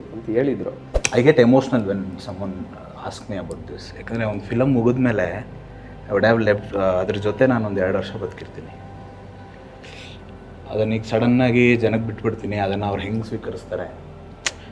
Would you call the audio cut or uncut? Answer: cut